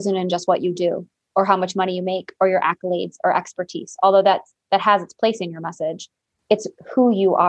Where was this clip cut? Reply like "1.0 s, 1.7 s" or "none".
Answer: 6.4 s